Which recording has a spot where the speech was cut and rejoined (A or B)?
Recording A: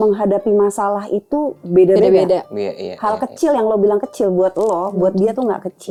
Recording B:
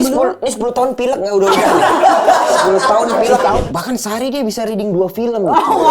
B